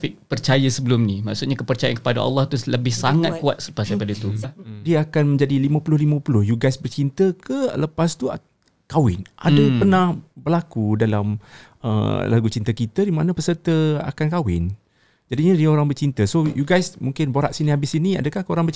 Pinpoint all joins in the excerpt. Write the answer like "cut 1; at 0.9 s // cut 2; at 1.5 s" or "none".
cut 1; at 4.4 s